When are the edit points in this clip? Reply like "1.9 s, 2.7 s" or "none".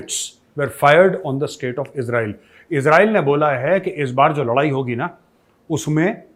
none